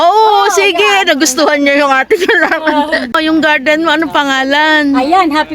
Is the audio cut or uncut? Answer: cut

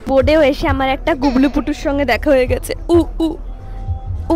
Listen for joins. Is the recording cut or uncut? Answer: uncut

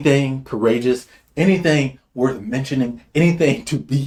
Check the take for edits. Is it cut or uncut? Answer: uncut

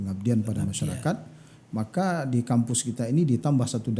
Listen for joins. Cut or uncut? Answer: uncut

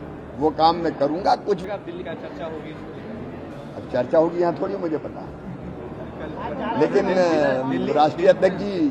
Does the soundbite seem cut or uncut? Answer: cut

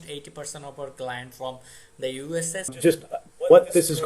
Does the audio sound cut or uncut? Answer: cut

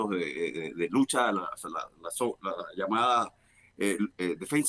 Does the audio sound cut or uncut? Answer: uncut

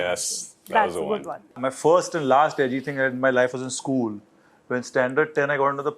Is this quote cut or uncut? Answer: cut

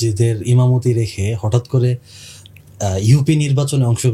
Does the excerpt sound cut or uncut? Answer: uncut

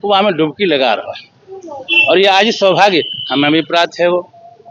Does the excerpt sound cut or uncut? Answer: uncut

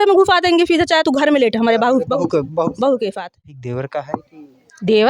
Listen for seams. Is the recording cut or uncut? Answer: cut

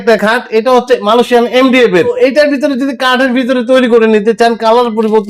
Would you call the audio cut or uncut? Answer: cut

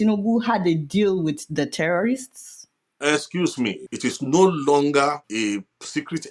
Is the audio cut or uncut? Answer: cut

